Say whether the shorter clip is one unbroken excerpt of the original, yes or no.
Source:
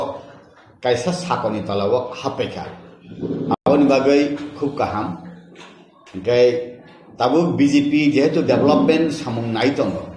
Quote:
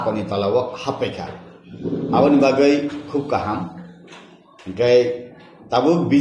no